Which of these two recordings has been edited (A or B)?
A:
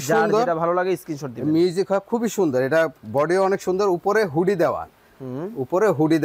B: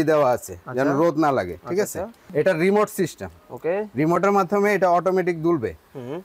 B